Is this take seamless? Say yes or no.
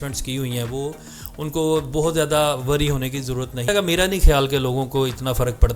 no